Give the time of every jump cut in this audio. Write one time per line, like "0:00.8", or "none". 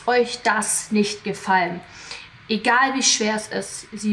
none